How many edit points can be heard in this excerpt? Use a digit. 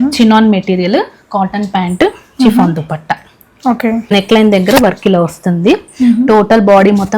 1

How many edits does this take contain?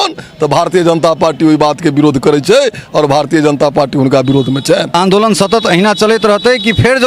1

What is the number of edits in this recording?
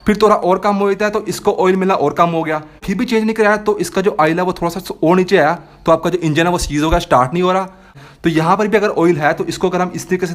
2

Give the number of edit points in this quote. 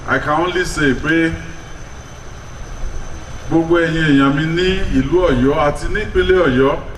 0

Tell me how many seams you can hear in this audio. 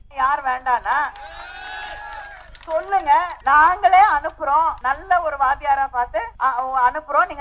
3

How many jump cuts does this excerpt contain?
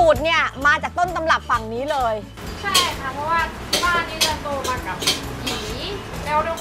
0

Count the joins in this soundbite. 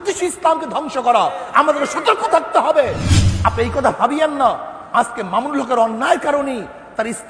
1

